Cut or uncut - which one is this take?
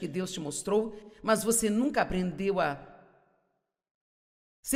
uncut